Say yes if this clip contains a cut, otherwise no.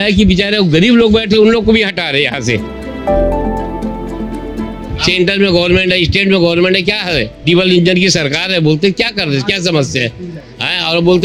no